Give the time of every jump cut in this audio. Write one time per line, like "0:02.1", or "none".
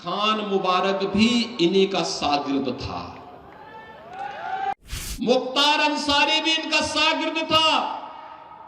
0:04.7